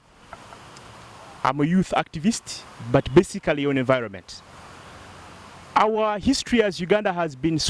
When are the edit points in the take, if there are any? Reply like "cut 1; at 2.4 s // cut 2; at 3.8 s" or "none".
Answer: none